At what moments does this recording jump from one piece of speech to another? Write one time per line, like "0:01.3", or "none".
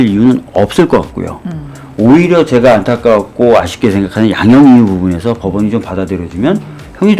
none